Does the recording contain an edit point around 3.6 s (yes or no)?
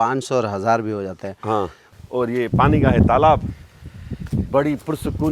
no